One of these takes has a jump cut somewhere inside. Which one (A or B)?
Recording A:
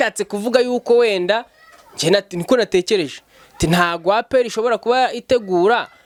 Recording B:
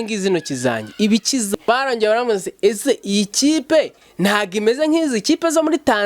B